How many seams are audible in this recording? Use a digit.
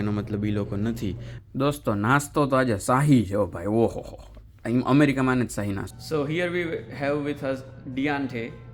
2